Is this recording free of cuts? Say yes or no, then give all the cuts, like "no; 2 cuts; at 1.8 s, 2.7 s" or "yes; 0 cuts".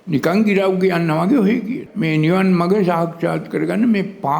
no; 1 cut; at 1.9 s